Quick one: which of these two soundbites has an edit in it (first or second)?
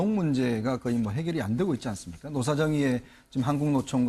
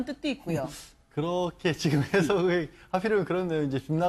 first